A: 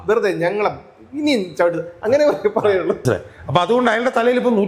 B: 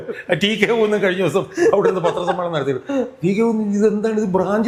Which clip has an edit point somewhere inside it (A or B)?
A